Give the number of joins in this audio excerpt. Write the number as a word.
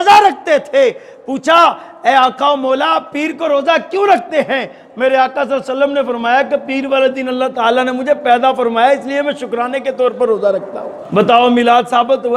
one